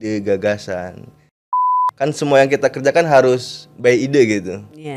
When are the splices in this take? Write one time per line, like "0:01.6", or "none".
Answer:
0:01.6